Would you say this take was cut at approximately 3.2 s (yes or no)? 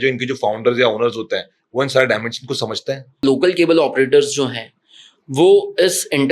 yes